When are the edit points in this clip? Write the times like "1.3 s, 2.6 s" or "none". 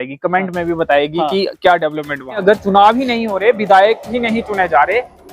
2.4 s